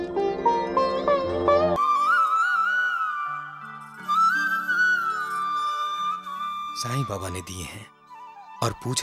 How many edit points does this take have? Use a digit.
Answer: 1